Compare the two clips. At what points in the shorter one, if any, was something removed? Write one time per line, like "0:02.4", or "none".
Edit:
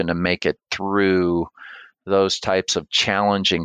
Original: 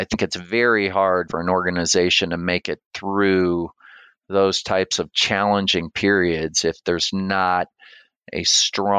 none